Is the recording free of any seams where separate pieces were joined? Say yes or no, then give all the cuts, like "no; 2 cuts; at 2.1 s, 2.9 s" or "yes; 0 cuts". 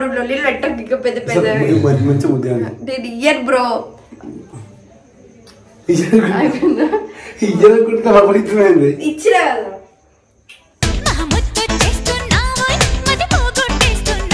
yes; 0 cuts